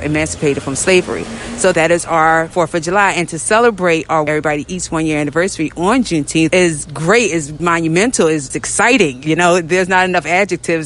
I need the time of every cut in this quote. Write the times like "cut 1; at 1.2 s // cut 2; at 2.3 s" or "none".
cut 1; at 1.7 s // cut 2; at 2.5 s // cut 3; at 4.3 s // cut 4; at 6.5 s // cut 5; at 7.5 s // cut 6; at 8.5 s